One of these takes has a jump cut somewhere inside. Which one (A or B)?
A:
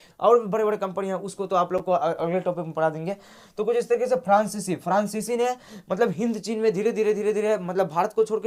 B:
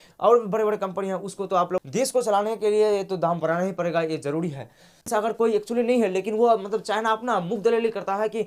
B